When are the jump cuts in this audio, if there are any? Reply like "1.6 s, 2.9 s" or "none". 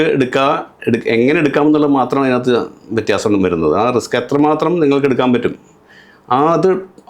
none